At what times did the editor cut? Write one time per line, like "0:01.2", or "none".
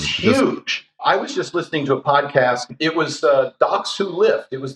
0:01.0
0:02.6

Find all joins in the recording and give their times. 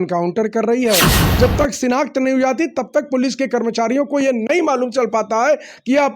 0:01.2

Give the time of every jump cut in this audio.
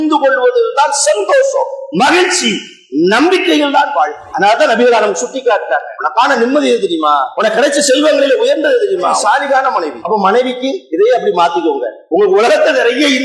0:04.2
0:06.0
0:07.3
0:09.2
0:10.0
0:10.8
0:11.9

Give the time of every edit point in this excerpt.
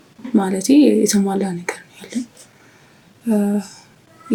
none

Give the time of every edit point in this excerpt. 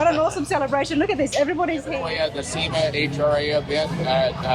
0:02.0

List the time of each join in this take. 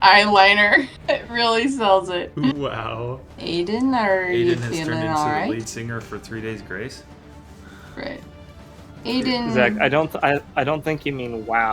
0:00.9
0:03.4

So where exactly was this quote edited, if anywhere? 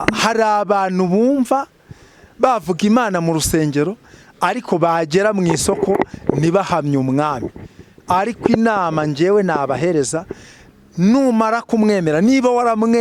none

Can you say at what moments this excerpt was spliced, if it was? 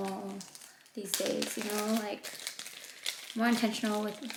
none

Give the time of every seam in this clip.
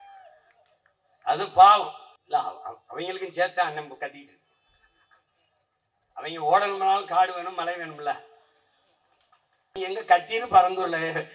0:02.1
0:09.7

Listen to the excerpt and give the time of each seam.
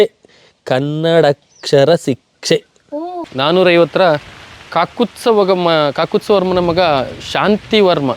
0:03.2

